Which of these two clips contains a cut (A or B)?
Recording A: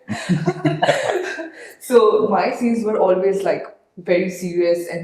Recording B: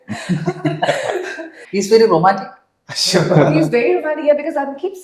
B